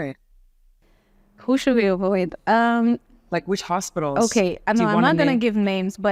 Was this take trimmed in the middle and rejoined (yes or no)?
no